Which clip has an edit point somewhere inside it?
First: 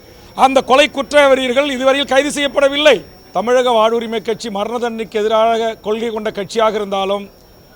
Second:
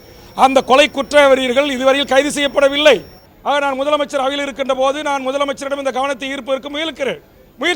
first; 1 cut; at 3.2 s

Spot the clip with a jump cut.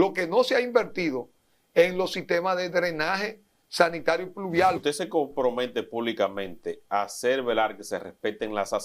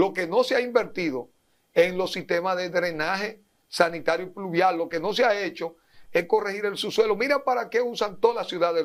first; 1 cut; at 4.8 s

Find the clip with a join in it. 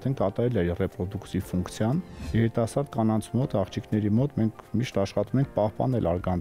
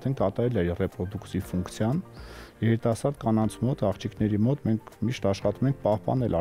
first; 1 cut; at 2.2 s

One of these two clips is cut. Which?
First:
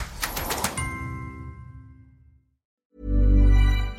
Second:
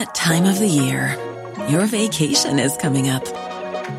first; 1 cut; at 2.8 s

